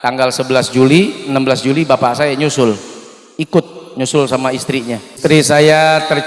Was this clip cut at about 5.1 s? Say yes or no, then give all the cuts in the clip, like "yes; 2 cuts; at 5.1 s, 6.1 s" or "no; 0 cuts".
yes; 1 cut; at 5.1 s